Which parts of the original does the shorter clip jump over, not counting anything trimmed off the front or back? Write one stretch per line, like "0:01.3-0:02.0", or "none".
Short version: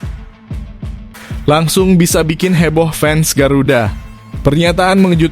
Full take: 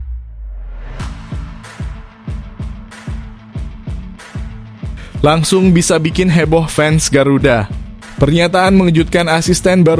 0:03.2-0:05.2